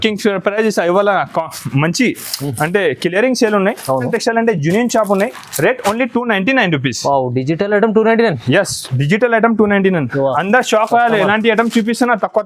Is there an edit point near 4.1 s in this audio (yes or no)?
yes